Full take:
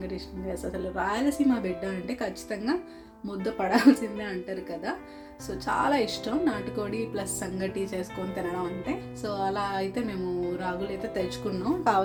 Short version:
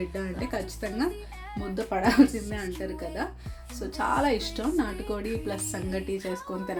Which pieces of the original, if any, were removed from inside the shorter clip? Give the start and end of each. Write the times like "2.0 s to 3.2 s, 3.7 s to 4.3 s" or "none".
none